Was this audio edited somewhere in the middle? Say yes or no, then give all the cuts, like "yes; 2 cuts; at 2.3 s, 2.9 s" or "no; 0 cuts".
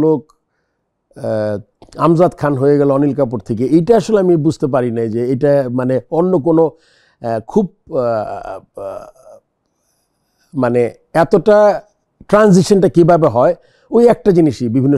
no; 0 cuts